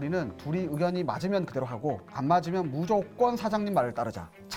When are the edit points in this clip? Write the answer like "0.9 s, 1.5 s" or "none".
none

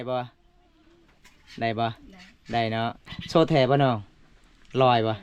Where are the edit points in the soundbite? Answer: 3.1 s

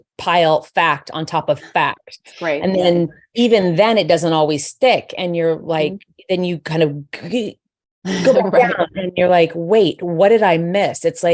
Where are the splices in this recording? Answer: none

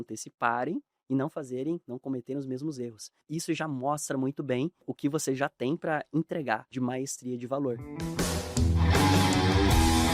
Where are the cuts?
3.2 s, 4.9 s, 6.7 s, 7.9 s

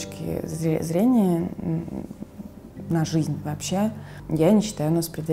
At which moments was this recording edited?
none

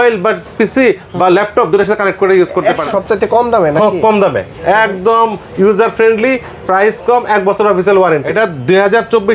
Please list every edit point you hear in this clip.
2.8 s, 8.3 s

